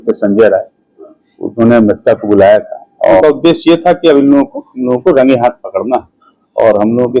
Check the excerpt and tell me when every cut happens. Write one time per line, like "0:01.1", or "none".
0:03.2